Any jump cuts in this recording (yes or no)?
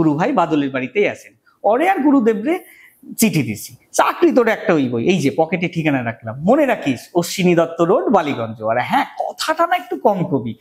no